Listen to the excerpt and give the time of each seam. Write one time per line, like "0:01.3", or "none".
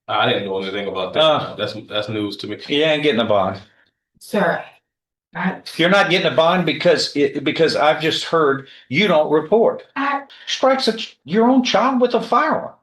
0:10.3

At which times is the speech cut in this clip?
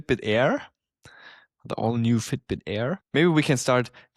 0:03.0

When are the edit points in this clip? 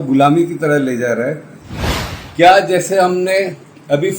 0:01.8

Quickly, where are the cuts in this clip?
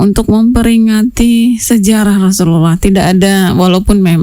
none

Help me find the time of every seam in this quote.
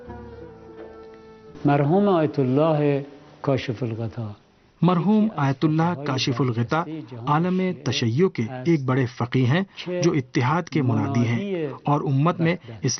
none

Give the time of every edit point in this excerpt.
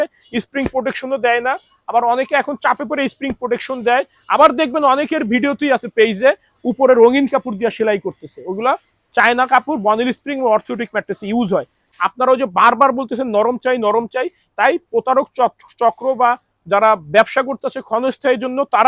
0:11.8

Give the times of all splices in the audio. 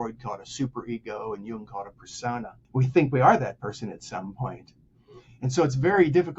0:02.6

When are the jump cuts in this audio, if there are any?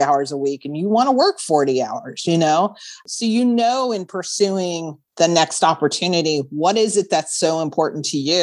0:03.0

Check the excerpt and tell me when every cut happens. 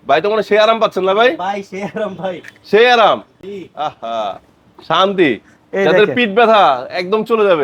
none

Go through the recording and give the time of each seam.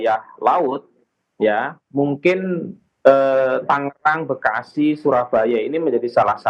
none

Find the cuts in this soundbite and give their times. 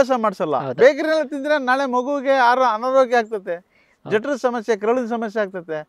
none

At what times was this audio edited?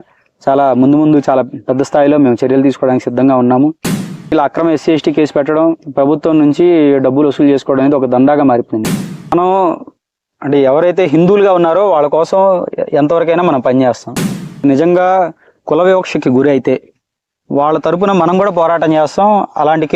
0:04.3
0:09.3
0:14.6

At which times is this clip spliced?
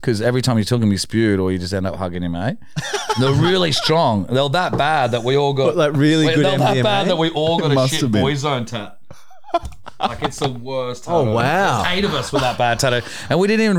none

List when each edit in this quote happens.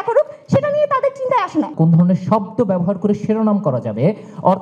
0:01.7

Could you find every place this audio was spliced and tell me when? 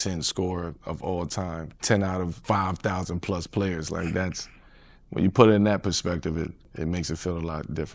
0:06.6

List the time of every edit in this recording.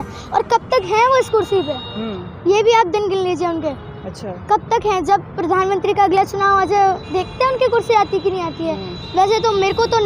none

